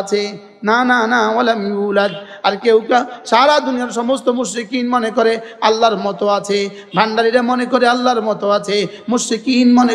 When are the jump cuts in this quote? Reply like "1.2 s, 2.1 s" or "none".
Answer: none